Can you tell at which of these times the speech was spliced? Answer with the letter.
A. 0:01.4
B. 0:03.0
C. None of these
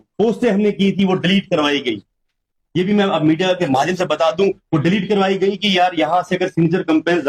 C